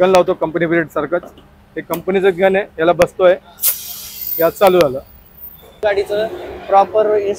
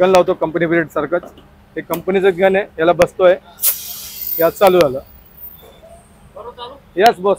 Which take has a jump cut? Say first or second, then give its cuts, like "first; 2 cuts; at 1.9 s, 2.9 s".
first; 1 cut; at 5.8 s